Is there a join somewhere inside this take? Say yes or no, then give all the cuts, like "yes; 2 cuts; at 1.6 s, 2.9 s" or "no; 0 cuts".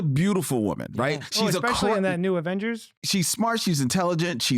yes; 1 cut; at 3.0 s